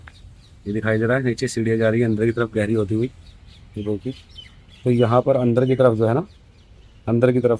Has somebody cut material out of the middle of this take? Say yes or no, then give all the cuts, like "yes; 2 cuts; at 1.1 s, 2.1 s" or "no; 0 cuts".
no; 0 cuts